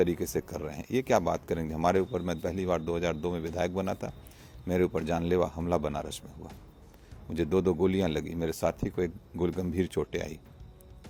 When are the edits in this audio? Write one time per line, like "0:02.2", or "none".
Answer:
none